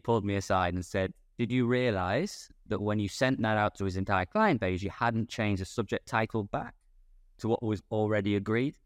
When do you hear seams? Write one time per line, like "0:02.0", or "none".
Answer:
0:01.2